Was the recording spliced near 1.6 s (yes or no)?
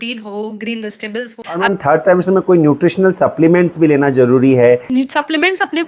yes